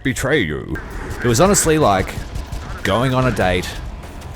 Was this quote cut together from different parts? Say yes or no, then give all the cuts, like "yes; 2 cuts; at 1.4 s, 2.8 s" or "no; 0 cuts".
yes; 1 cut; at 1.0 s